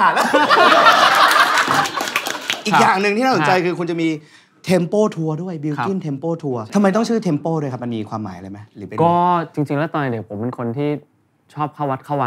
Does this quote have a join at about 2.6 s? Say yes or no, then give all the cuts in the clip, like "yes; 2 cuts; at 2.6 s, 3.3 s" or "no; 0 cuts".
yes; 2 cuts; at 2.6 s, 6.7 s